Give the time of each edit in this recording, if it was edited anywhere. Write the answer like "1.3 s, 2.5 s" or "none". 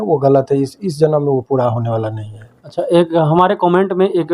none